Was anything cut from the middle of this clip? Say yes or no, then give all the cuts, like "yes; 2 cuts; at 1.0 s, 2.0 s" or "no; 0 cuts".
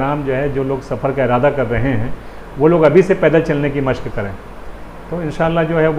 no; 0 cuts